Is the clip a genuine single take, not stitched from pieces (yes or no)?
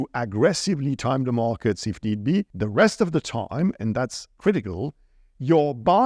no